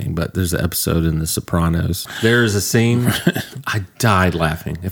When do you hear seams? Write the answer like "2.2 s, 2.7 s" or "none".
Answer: 2.1 s